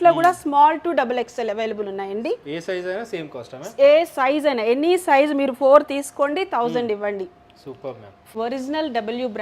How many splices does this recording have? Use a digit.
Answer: 1